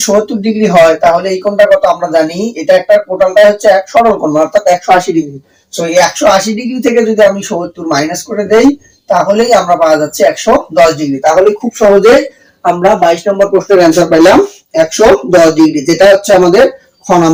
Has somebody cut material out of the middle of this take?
no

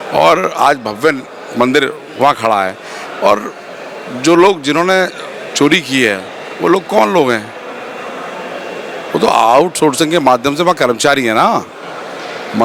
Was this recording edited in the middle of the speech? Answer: no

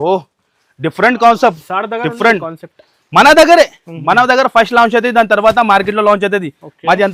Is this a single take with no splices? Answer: yes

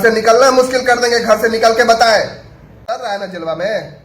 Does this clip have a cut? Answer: yes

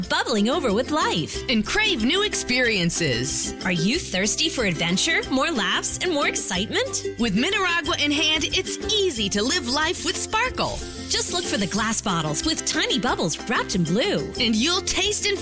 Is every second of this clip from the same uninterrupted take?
yes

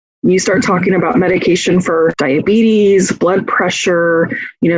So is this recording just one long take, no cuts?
no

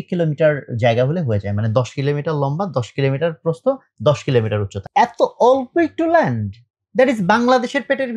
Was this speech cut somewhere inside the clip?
yes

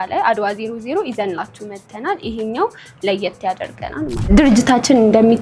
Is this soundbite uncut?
no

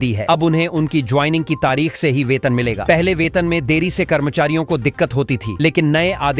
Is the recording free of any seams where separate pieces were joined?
yes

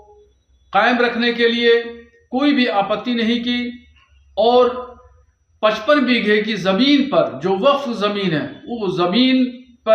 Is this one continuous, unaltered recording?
yes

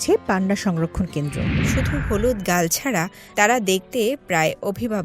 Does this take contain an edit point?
yes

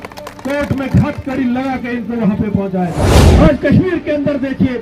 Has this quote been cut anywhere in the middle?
yes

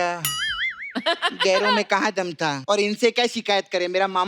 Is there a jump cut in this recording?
yes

